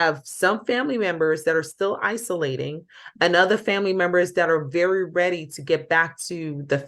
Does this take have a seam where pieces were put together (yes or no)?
no